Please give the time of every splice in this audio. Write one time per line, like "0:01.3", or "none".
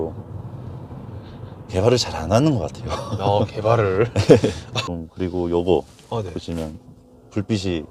0:04.7